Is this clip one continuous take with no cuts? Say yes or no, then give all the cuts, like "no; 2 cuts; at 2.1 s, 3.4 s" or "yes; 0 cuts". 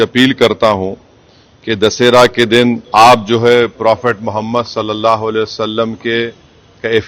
no; 1 cut; at 2.8 s